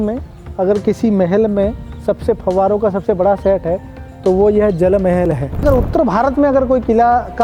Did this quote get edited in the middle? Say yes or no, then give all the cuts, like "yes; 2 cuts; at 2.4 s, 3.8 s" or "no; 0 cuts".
yes; 1 cut; at 5.6 s